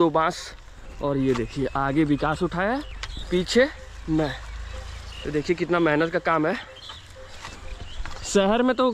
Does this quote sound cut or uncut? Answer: uncut